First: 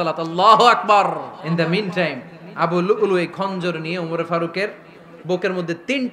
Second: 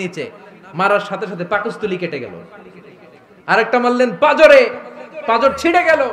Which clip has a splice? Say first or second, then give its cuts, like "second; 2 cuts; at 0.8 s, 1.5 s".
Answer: first; 1 cut; at 1.4 s